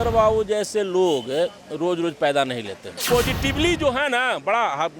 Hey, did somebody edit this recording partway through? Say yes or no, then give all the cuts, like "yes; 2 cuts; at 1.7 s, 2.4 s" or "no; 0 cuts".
yes; 1 cut; at 2.9 s